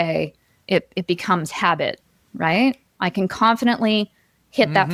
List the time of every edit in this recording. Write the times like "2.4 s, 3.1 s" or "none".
none